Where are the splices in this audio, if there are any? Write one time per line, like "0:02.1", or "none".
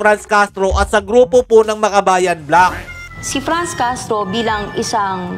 none